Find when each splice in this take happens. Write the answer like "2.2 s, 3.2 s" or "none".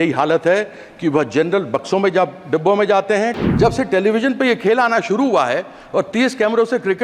3.4 s